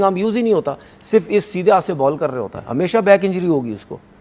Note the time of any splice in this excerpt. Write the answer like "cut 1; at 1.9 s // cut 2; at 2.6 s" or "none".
cut 1; at 2.6 s

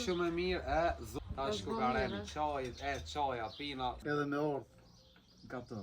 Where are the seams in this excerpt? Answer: cut 1; at 1.1 s // cut 2; at 4.0 s

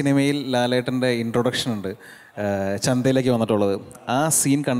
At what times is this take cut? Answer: none

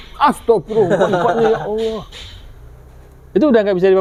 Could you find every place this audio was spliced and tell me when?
none

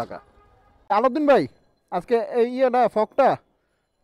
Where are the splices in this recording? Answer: cut 1; at 0.9 s

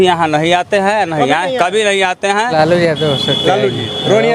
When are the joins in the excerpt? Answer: cut 1; at 2.5 s

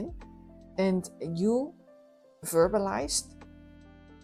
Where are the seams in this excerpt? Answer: none

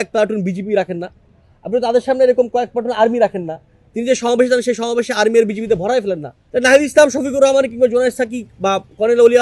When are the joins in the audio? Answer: none

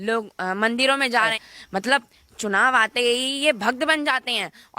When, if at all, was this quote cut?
cut 1; at 1.4 s

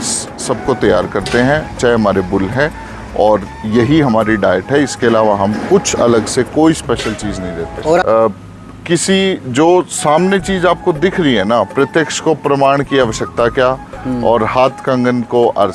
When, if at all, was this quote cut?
cut 1; at 8.0 s

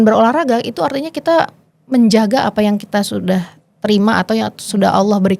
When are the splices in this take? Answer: none

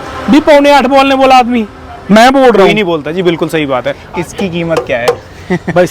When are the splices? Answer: cut 1; at 4.0 s

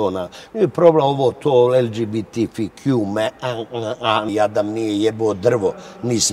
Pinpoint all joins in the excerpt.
cut 1; at 4.3 s

